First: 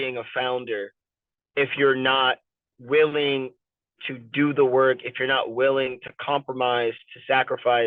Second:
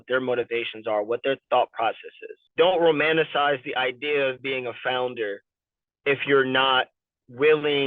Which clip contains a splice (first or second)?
second